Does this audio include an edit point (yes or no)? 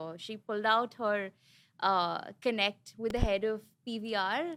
no